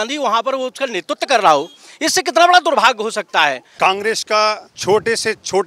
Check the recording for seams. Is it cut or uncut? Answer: cut